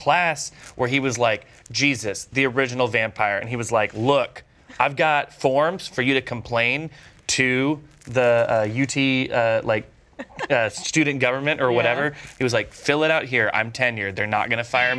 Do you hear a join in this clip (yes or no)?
no